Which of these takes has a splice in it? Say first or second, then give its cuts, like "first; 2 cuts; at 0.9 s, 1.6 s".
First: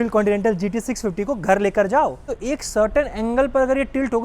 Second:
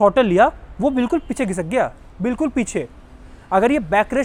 first; 1 cut; at 2.3 s